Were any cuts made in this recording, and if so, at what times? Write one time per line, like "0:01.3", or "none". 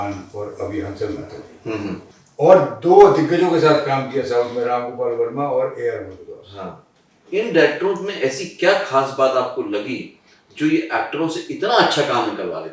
0:07.3